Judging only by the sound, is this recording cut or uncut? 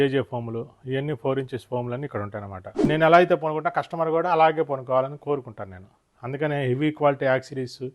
cut